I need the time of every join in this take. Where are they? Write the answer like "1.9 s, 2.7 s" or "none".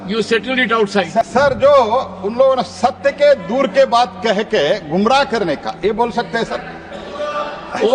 1.3 s